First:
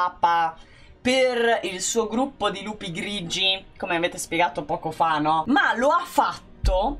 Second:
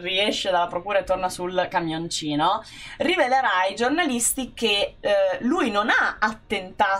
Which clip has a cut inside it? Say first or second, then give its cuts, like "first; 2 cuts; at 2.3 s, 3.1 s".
first; 1 cut; at 5.4 s